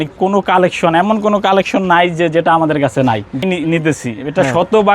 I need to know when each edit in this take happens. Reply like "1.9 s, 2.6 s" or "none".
3.4 s